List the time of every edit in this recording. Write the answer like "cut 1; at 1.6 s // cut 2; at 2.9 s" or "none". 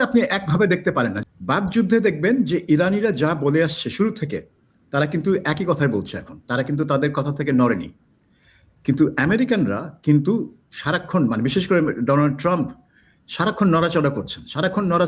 cut 1; at 1.2 s

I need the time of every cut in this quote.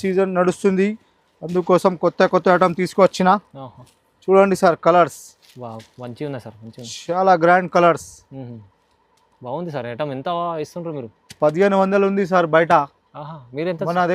none

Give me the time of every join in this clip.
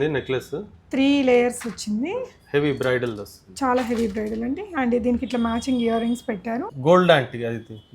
cut 1; at 6.7 s

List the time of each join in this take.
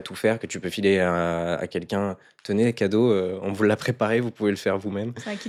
none

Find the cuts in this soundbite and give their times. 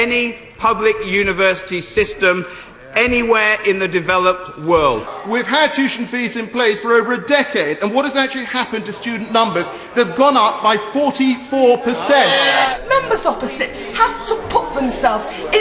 cut 1; at 5.1 s // cut 2; at 12.7 s

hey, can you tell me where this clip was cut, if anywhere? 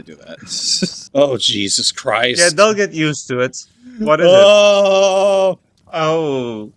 cut 1; at 1.0 s // cut 2; at 5.7 s

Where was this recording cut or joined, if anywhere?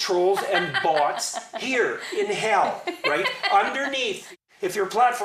cut 1; at 4.3 s

